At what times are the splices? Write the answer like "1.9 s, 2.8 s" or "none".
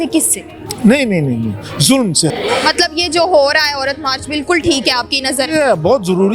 2.3 s